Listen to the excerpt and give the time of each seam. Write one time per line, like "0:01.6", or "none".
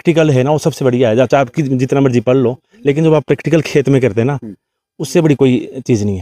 none